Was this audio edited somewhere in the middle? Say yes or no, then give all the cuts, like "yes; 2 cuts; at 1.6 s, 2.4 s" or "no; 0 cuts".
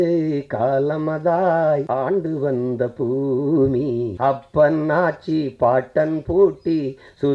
yes; 2 cuts; at 1.9 s, 4.1 s